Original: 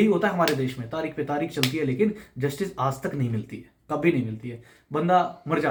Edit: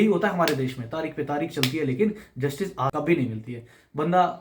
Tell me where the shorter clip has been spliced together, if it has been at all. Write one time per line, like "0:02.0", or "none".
0:02.9